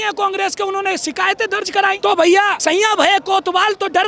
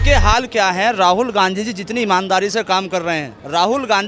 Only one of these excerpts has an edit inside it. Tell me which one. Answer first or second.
first